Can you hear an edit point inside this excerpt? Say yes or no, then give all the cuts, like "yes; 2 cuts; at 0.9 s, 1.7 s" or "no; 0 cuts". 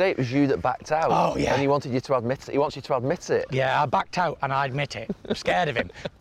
no; 0 cuts